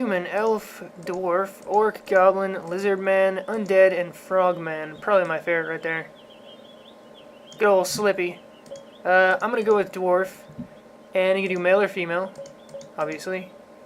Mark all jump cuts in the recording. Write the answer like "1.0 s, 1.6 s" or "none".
2.0 s